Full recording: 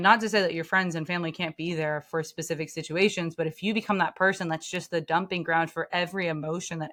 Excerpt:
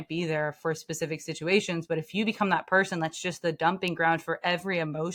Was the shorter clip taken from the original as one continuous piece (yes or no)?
yes